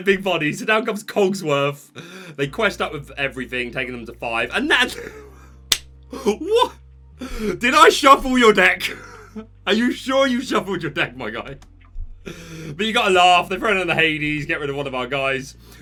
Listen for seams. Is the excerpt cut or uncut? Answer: uncut